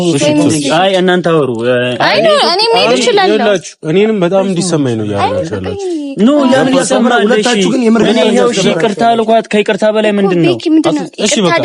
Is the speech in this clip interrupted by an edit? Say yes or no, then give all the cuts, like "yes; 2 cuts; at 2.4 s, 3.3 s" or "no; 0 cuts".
no; 0 cuts